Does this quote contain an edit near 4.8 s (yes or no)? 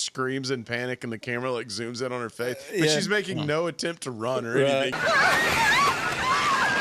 no